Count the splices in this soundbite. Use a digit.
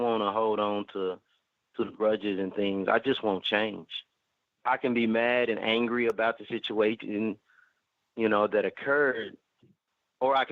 1